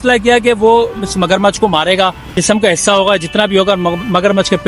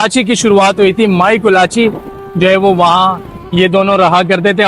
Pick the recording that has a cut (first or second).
first